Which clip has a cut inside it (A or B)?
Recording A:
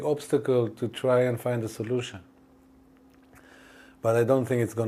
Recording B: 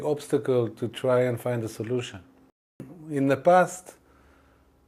B